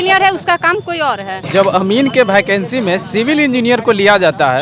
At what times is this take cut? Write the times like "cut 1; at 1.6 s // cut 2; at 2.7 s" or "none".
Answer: cut 1; at 1.3 s